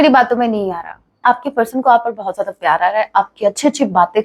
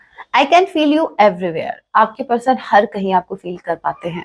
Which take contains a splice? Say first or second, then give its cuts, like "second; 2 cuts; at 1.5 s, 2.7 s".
first; 1 cut; at 1.2 s